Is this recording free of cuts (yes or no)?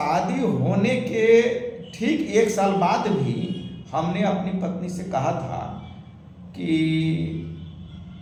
yes